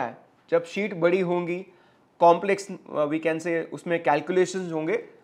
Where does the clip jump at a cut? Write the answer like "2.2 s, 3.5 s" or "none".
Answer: none